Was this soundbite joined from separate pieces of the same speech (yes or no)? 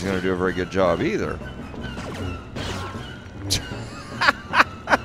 no